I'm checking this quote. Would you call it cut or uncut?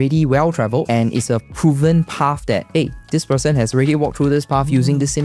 cut